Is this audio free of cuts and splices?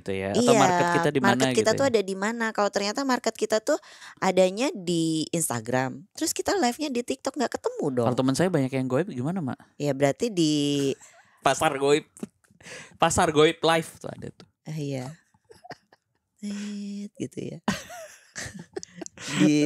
yes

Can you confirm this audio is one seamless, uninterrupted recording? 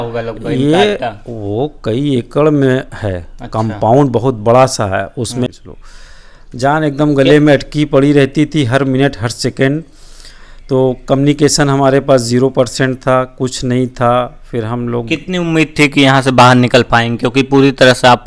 no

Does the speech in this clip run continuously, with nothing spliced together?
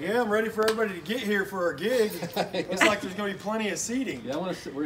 yes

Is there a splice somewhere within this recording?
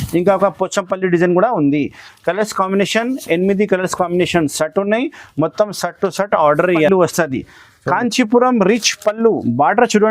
yes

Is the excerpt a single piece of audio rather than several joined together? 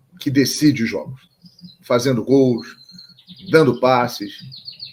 yes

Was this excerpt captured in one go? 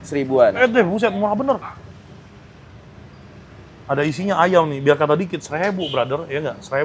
yes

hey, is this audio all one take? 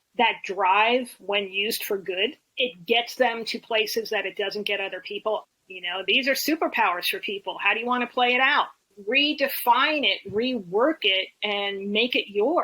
no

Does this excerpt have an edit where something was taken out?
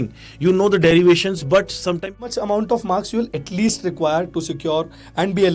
yes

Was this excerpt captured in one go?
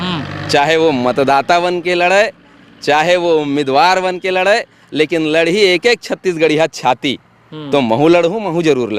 yes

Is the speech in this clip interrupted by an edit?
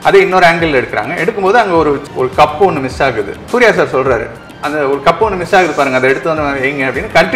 yes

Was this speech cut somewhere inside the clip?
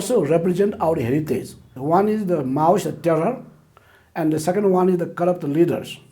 yes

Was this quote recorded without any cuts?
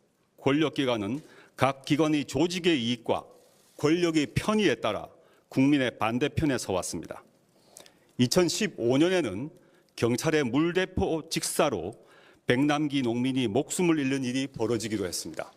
no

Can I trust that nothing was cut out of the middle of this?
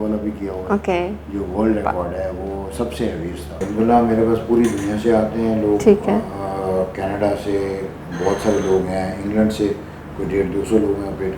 no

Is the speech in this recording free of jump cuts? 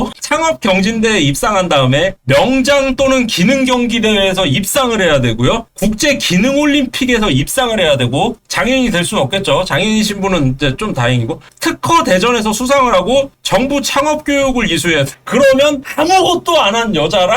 yes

